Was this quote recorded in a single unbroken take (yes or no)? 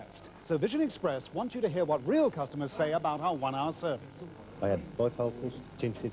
no